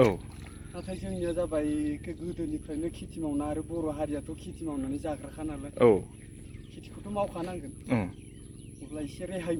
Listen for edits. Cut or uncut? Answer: uncut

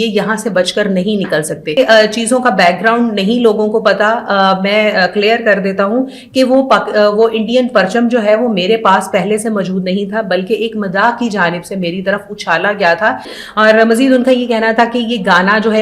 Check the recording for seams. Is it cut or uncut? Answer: cut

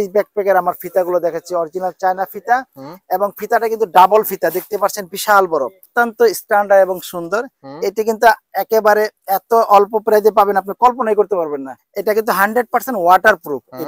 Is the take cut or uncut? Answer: cut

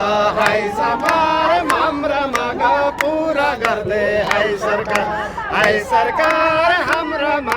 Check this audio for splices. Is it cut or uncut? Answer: uncut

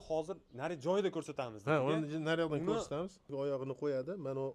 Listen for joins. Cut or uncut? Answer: cut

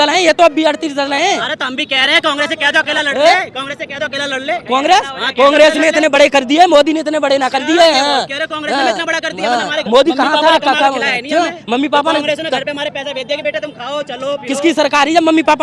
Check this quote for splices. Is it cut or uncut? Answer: uncut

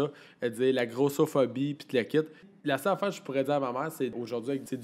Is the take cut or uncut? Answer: cut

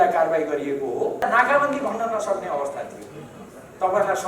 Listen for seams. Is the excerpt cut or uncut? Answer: cut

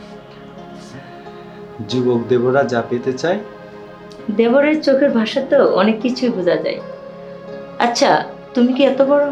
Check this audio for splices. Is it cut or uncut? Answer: uncut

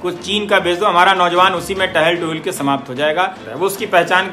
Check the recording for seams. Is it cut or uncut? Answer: cut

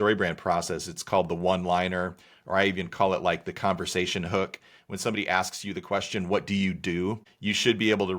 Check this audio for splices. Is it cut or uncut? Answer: cut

